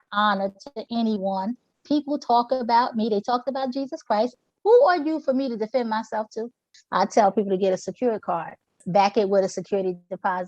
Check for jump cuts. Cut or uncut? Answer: cut